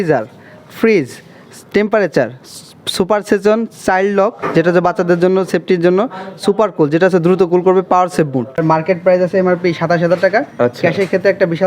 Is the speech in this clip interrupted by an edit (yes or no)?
yes